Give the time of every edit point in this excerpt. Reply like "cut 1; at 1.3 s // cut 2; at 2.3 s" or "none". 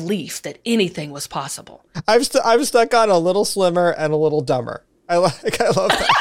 cut 1; at 2.0 s